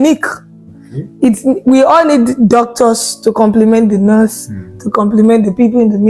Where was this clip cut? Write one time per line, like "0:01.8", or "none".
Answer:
none